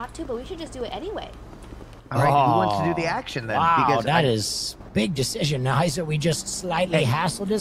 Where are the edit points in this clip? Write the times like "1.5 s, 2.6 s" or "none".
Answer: none